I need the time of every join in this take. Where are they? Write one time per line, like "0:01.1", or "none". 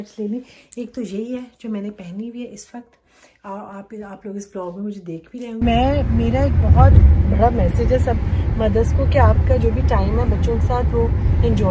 0:05.6